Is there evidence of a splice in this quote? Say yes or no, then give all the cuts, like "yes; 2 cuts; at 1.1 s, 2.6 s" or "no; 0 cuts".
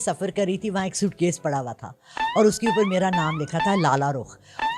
no; 0 cuts